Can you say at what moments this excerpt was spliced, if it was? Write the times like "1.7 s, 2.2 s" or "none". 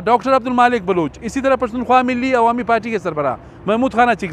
none